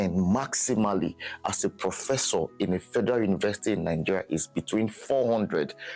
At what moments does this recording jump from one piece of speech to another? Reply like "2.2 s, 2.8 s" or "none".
none